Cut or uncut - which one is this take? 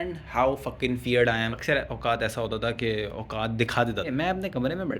cut